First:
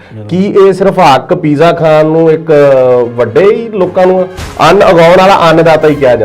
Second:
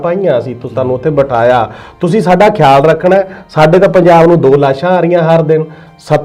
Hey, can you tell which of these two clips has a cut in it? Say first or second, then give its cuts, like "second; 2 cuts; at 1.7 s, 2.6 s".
first; 1 cut; at 4.4 s